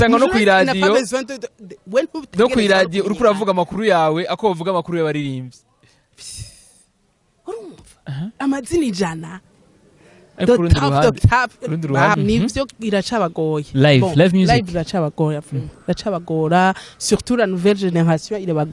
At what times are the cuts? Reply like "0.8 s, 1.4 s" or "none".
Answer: 12.2 s